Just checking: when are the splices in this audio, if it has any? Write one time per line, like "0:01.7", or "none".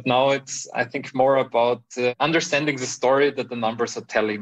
0:02.1